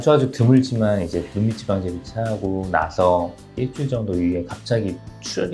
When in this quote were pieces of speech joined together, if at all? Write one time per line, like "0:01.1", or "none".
none

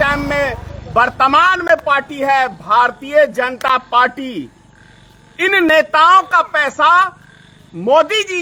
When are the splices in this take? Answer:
none

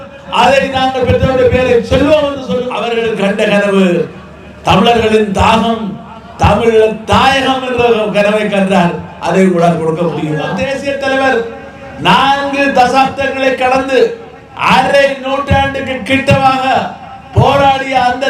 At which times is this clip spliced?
0:02.8
0:10.5

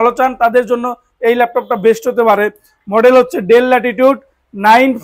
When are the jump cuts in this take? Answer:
none

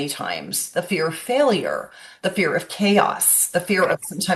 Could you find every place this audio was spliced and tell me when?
none

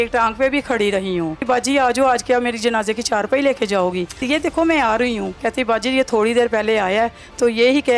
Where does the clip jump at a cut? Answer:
0:01.4
0:04.2
0:05.3

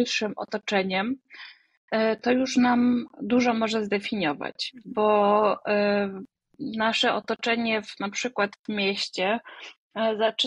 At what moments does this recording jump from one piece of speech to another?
none

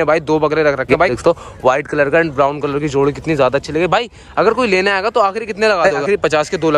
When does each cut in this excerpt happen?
0:01.1
0:06.0

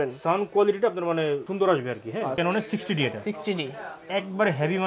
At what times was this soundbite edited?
0:02.3

